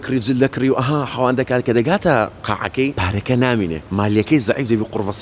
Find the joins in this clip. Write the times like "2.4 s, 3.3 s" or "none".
3.0 s, 3.8 s